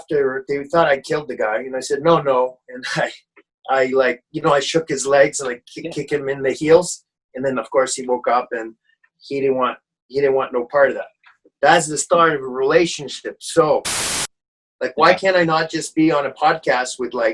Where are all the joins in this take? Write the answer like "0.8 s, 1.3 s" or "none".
14.2 s